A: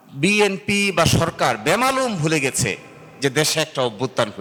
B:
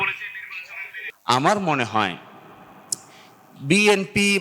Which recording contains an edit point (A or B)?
B